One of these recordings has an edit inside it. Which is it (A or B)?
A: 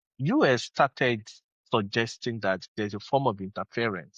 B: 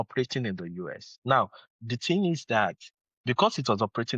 B